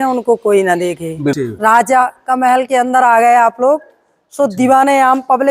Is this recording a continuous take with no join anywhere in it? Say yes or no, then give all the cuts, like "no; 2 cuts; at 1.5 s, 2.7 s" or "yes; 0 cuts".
no; 1 cut; at 1.4 s